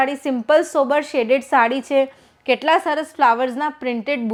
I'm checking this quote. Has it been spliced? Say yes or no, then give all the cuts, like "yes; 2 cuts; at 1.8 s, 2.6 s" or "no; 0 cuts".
no; 0 cuts